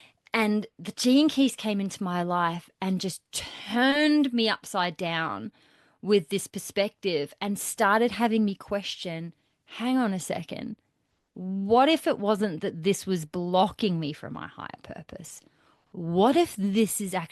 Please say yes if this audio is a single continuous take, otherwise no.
yes